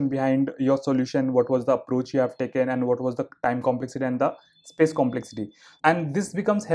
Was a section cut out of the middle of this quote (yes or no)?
yes